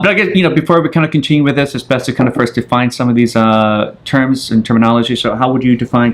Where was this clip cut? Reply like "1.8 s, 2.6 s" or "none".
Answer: 2.2 s